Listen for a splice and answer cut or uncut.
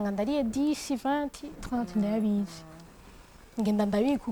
uncut